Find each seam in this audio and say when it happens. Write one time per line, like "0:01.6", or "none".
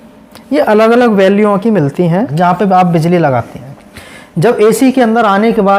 0:02.3